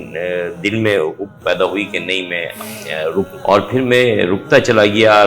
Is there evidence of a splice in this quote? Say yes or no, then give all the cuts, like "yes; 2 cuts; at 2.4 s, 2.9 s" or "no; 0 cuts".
yes; 1 cut; at 3.3 s